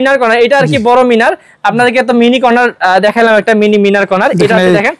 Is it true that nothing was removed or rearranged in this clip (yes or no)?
yes